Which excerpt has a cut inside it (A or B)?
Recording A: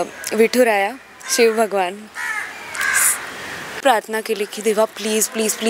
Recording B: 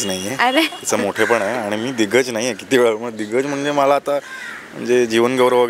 A